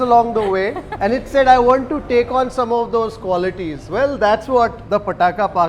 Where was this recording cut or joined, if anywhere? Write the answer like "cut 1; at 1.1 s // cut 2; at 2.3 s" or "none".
cut 1; at 0.9 s // cut 2; at 4.8 s